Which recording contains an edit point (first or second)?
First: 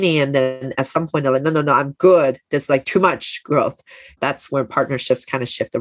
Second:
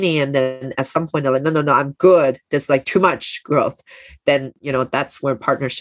first